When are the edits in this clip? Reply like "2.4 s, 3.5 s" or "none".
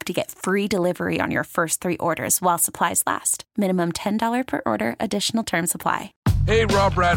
6.1 s